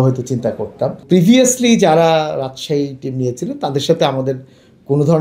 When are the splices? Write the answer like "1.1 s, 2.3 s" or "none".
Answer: 1.0 s